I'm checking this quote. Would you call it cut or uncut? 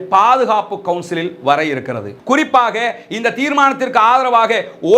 cut